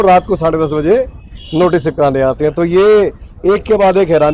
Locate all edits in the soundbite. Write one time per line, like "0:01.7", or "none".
none